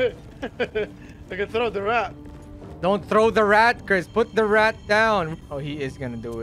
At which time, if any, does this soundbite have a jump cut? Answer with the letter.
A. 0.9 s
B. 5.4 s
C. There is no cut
B